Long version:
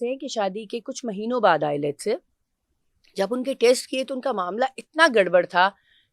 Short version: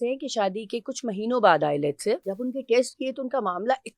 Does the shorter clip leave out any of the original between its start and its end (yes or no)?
yes